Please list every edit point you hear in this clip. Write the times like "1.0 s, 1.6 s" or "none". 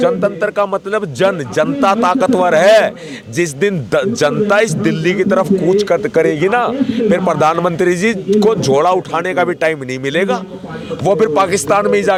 none